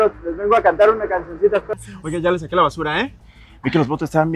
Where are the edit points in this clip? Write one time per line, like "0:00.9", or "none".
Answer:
0:01.7